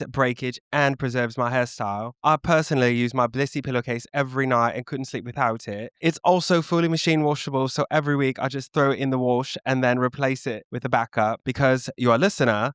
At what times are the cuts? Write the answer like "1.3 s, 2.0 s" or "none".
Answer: 5.9 s, 10.7 s, 11.4 s